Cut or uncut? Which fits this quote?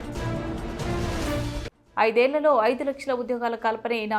cut